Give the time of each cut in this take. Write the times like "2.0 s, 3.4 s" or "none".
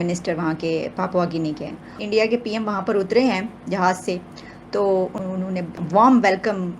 5.2 s